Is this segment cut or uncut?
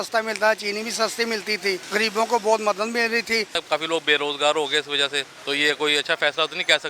cut